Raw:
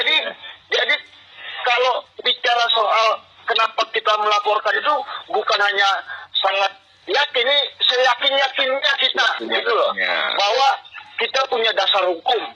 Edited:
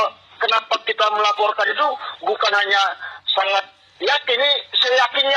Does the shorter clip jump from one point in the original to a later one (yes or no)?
no